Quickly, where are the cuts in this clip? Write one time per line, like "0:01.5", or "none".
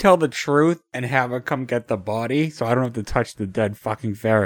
0:00.9